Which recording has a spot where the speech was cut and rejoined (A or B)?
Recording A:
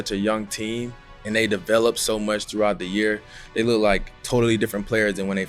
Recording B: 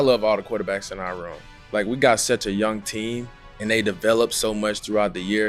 A